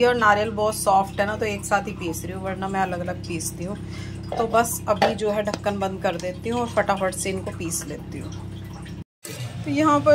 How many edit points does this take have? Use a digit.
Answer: 0